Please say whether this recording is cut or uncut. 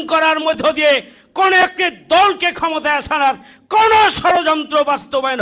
uncut